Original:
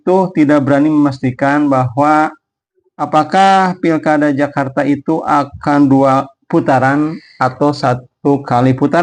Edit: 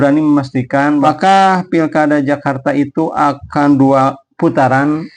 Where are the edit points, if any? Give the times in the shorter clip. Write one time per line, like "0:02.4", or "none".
0:01.0